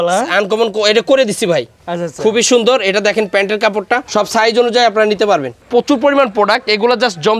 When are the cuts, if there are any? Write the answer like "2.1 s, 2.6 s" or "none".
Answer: 4.1 s, 5.6 s